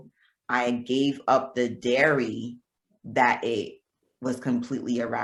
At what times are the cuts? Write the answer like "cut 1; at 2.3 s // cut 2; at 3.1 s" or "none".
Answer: none